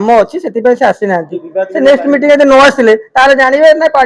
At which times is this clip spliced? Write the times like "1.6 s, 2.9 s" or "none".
none